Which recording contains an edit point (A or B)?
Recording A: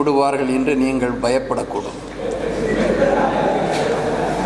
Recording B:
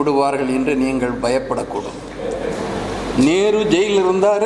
B